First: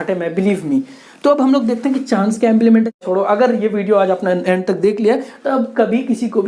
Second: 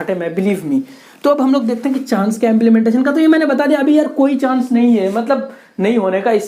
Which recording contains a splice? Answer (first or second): first